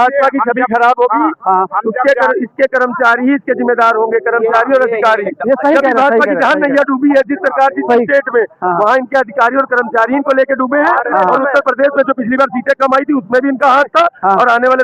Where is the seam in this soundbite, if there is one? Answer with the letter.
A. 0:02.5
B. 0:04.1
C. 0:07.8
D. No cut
D